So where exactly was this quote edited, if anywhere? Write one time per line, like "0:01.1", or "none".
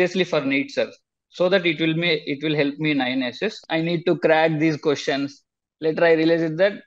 0:03.6